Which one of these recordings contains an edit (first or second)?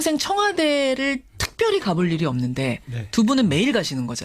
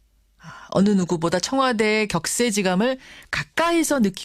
first